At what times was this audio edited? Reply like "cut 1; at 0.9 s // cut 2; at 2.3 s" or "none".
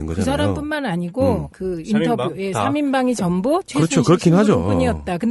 cut 1; at 2.7 s